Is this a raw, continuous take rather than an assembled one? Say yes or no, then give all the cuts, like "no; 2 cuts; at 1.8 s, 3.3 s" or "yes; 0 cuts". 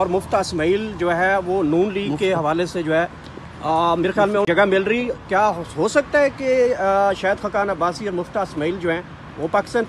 yes; 0 cuts